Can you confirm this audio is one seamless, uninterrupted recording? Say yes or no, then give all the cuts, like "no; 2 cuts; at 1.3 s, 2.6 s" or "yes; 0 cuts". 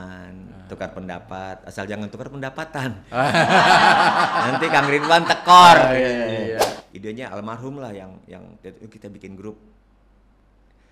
no; 1 cut; at 6.8 s